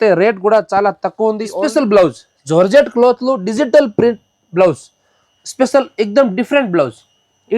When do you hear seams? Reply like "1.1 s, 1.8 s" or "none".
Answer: 1.5 s